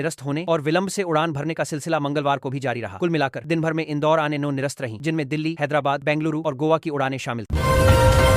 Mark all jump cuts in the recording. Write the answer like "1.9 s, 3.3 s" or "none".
7.4 s